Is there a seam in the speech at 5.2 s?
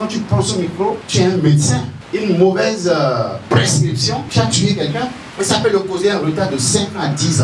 yes; 4 cuts; at 1.0 s, 2.0 s, 4.3 s, 5.2 s

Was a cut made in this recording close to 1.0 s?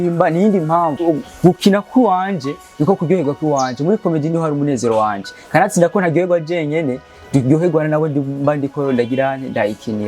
yes; 1 cut; at 1.0 s

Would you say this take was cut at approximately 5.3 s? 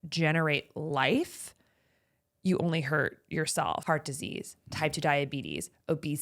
no; 1 cut; at 3.8 s

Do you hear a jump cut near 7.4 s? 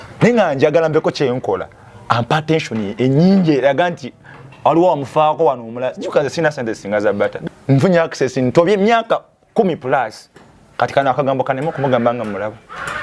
yes; 1 cut; at 7.4 s

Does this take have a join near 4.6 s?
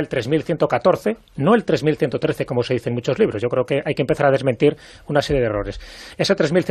no; 1 cut; at 1.3 s

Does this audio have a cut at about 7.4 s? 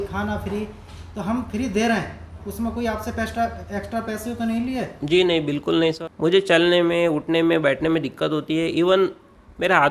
no; 1 cut; at 6.0 s

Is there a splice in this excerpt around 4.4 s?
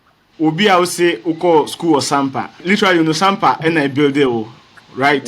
no; 1 cut; at 2.6 s

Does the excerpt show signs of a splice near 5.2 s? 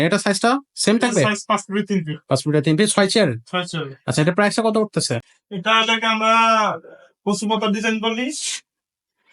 yes; 1 cut; at 5.2 s

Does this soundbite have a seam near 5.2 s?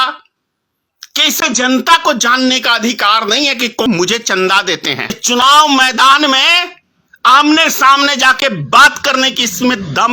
yes; 2 cuts; at 3.8 s, 5.2 s

